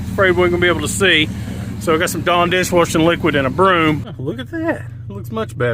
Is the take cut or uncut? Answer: cut